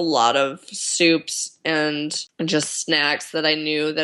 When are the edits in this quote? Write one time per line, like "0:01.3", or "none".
0:02.2